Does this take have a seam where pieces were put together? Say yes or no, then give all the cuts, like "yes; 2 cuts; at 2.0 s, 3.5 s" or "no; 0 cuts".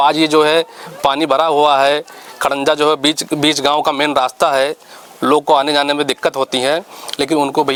no; 0 cuts